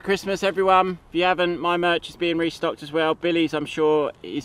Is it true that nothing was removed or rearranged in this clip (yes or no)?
no